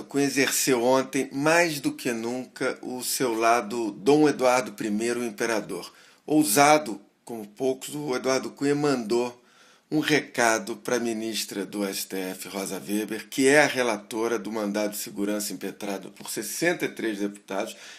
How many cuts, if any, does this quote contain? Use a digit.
0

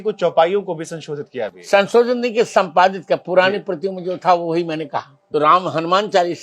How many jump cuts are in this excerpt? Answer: 1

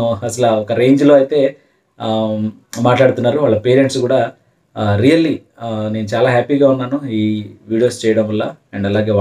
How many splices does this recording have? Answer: 0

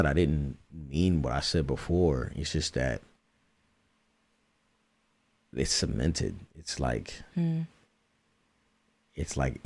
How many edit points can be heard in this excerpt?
0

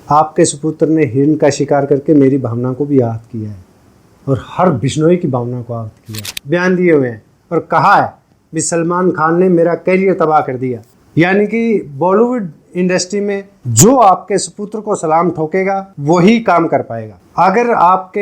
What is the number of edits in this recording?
1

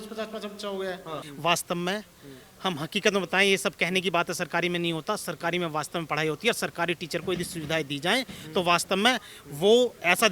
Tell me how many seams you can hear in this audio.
1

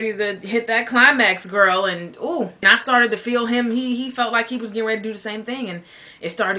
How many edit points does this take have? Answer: 1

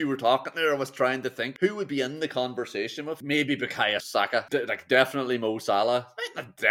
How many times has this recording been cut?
3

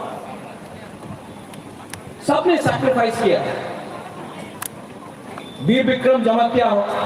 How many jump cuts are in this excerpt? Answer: 0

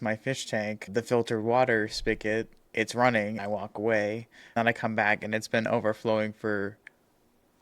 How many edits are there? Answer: 3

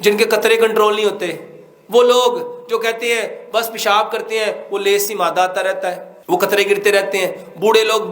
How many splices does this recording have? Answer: 1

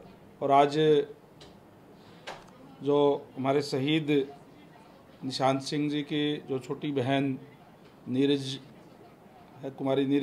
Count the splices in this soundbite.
0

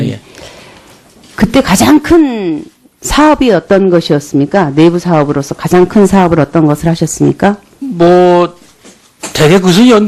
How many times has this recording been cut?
0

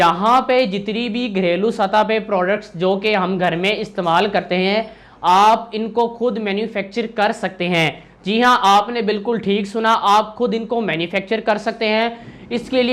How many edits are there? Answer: 0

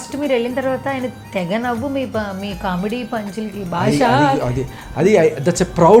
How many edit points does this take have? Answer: 0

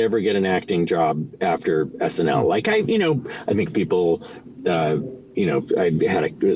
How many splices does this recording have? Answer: 0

